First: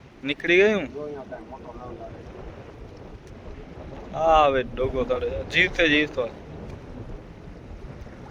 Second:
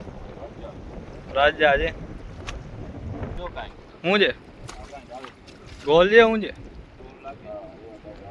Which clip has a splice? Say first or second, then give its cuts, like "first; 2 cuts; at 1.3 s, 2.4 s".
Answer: second; 1 cut; at 3.4 s